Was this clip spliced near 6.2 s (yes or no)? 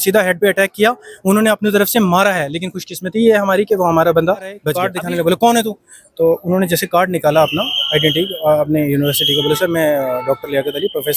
no